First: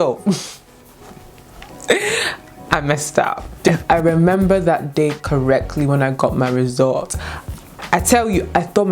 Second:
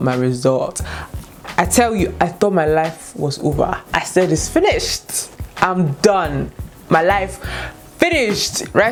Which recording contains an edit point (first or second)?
first